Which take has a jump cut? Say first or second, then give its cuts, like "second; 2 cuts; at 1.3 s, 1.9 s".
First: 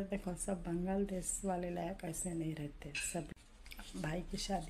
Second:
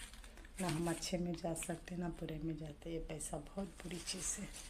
first; 1 cut; at 3.3 s